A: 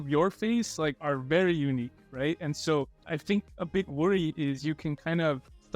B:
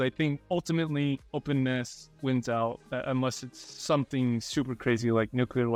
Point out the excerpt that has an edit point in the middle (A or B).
A